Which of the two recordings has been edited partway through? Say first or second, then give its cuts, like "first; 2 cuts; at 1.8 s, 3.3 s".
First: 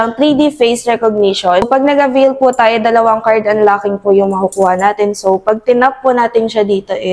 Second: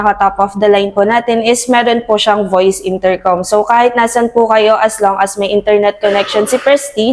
first; 1 cut; at 1.7 s